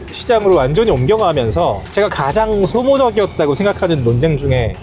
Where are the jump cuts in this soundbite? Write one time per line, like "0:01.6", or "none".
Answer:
none